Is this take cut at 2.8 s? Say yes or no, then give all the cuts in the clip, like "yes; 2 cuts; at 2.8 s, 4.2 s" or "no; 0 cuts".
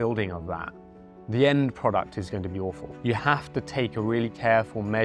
yes; 1 cut; at 2.8 s